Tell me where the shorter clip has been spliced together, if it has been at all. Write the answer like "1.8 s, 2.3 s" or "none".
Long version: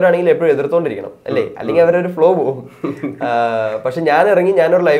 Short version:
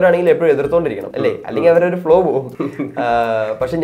1.0 s, 2.5 s